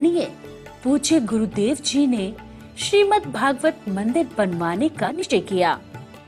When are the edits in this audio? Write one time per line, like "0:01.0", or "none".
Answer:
0:05.0